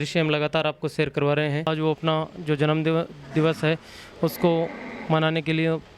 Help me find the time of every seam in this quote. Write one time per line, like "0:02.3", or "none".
0:01.7